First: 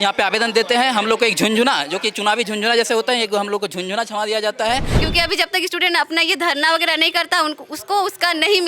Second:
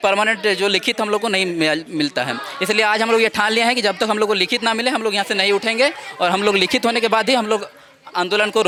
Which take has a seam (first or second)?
first